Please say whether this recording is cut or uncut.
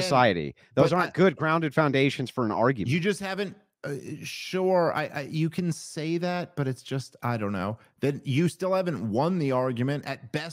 cut